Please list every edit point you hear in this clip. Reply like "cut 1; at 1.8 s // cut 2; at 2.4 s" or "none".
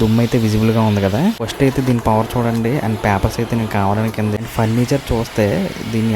cut 1; at 1.5 s // cut 2; at 4.4 s